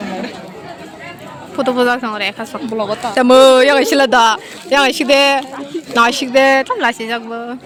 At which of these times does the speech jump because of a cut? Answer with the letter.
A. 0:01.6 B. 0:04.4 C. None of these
C